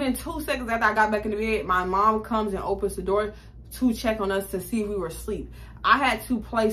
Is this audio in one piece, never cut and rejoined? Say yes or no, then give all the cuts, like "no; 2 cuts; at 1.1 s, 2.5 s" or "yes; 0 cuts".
yes; 0 cuts